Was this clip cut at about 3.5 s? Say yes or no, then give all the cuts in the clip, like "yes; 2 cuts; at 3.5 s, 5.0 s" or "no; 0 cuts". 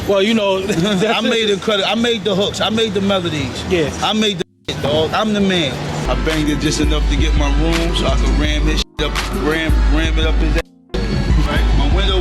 no; 1 cut; at 5.9 s